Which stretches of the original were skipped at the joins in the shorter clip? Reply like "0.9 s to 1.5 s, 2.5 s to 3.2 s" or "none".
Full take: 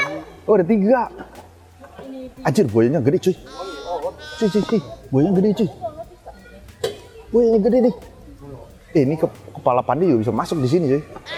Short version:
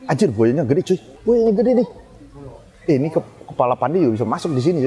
3.5 s to 7.2 s